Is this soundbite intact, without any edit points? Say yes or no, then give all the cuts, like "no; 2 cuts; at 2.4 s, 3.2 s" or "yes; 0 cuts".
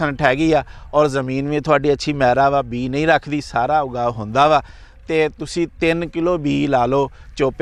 yes; 0 cuts